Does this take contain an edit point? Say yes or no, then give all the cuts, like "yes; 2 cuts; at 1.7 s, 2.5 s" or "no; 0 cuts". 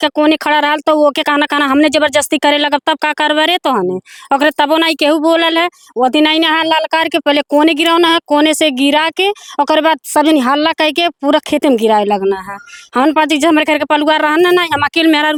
no; 0 cuts